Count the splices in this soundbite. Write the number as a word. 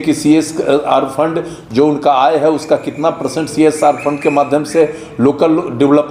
zero